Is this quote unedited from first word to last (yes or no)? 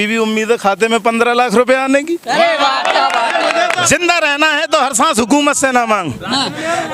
no